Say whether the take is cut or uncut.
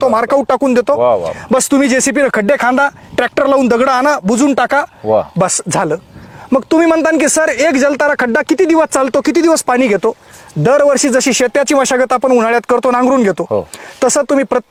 uncut